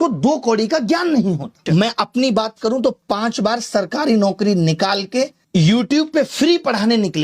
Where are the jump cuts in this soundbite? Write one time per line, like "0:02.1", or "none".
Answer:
0:05.4